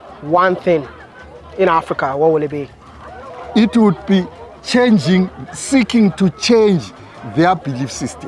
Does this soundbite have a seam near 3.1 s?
yes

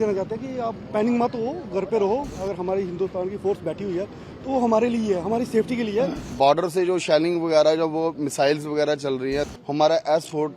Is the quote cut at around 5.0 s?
no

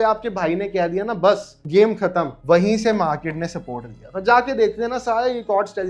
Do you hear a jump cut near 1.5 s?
no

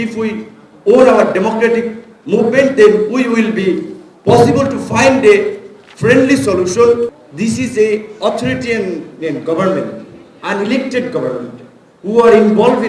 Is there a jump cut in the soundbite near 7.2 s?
yes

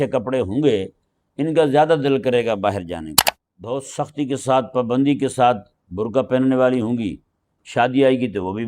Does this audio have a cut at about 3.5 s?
yes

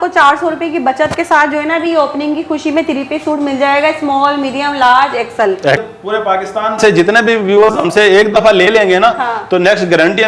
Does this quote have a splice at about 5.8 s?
yes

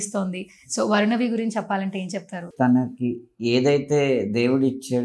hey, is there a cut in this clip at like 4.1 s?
no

